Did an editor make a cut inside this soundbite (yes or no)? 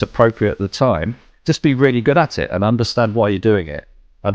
no